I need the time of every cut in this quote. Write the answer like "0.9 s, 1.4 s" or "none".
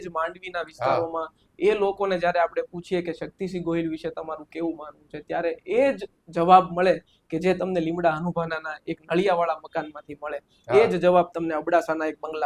none